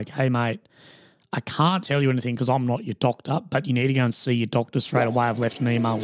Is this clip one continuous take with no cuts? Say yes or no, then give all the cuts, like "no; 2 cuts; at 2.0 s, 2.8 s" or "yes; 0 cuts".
yes; 0 cuts